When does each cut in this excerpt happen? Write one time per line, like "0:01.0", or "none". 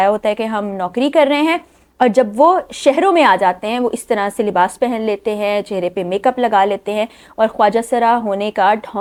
none